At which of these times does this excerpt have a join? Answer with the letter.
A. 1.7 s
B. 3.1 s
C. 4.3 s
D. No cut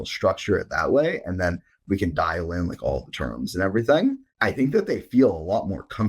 C